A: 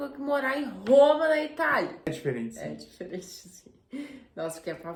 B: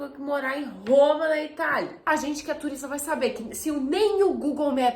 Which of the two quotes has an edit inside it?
B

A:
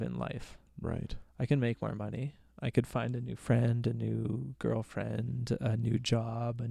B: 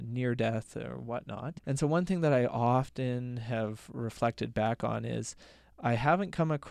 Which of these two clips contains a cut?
B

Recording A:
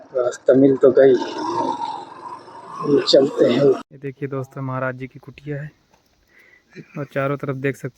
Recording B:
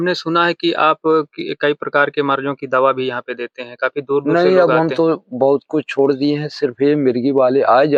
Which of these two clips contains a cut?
A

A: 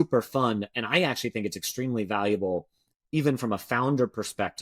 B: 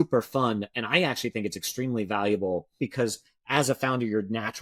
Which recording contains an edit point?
B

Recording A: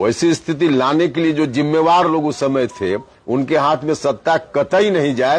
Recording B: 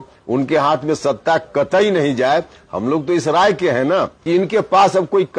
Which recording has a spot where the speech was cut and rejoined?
B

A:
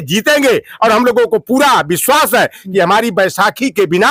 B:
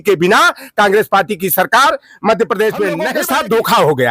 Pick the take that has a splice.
B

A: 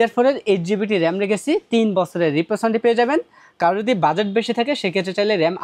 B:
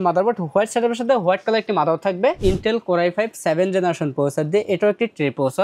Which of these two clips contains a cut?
B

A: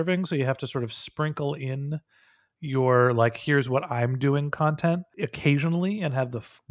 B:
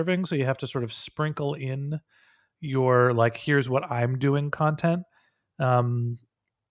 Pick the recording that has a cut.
A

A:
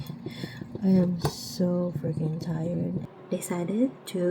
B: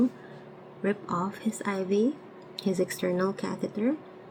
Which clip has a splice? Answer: A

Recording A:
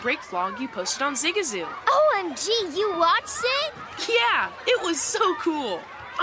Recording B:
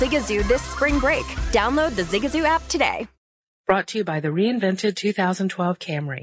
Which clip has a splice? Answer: B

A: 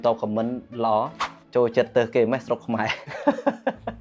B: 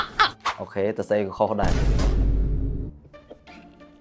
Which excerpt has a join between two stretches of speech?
A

